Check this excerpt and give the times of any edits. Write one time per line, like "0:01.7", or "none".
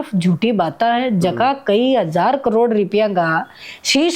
none